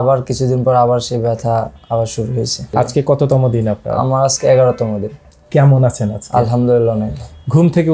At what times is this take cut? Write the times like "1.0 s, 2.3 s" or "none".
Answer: 2.7 s

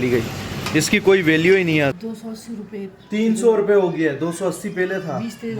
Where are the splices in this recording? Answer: 1.9 s

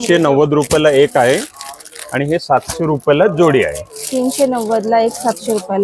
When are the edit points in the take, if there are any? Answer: none

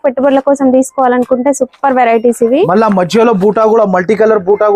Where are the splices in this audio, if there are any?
none

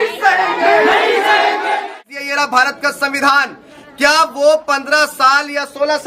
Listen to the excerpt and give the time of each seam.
2.0 s

